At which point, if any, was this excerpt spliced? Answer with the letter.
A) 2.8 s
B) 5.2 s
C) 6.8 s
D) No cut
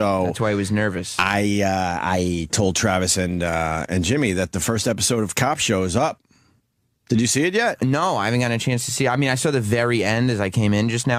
D